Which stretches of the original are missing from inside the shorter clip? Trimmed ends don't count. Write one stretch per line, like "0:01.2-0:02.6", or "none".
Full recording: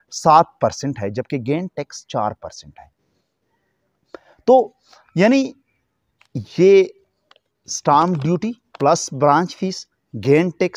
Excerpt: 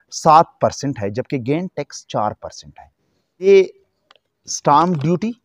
0:03.5-0:06.7